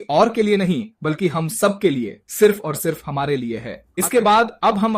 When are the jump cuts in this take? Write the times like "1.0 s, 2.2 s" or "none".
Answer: 3.8 s